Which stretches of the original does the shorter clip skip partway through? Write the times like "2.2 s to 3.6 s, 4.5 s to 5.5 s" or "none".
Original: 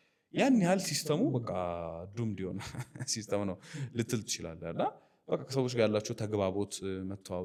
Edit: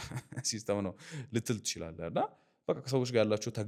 none